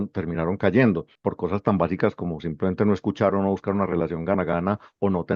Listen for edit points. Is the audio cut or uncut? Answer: cut